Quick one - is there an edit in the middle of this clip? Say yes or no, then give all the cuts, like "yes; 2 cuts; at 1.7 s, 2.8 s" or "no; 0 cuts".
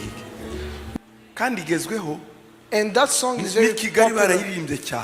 yes; 1 cut; at 0.9 s